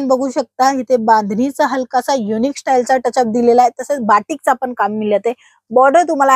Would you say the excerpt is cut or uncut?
uncut